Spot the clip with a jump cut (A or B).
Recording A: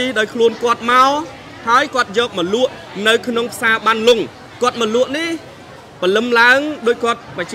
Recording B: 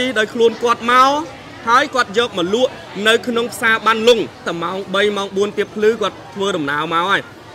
B